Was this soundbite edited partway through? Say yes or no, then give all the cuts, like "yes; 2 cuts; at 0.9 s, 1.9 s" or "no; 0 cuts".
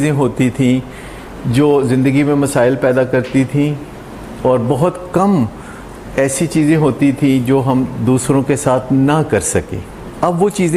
no; 0 cuts